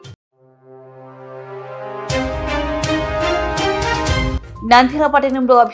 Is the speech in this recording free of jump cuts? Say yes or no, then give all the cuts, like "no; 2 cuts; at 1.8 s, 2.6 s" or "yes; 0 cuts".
no; 1 cut; at 4.3 s